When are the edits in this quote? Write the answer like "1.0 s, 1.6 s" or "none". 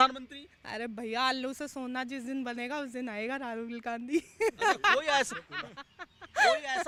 none